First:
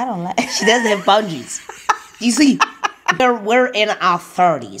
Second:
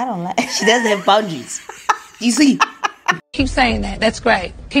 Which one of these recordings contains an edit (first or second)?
first